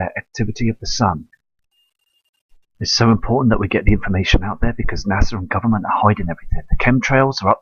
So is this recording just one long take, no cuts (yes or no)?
no